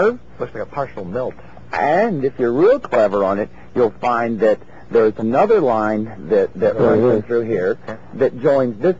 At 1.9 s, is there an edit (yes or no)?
yes